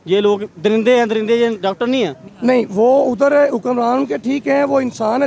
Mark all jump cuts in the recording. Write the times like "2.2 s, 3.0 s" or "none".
2.2 s

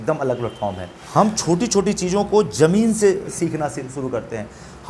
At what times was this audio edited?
0.9 s

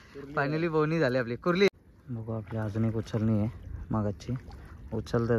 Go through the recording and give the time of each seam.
1.7 s

